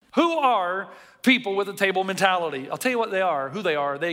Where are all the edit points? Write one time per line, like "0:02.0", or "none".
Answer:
none